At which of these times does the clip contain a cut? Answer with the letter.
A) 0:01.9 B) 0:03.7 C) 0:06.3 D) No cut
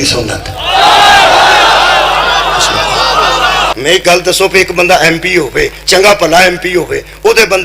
B